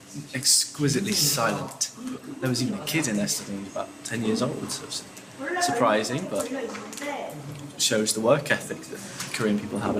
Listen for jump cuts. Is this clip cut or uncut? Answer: uncut